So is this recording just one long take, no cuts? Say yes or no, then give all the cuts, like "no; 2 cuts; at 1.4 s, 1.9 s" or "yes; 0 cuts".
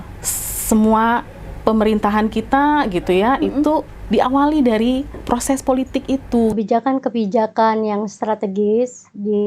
no; 1 cut; at 6.5 s